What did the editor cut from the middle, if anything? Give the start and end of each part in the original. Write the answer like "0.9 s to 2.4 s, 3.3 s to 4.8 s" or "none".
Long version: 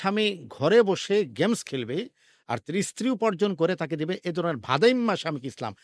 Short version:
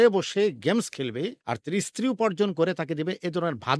2.2 s to 2.5 s